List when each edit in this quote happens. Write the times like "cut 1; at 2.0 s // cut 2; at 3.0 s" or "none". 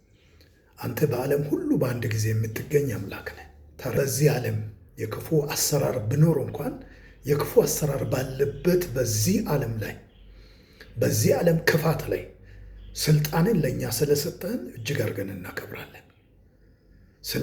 cut 1; at 3.9 s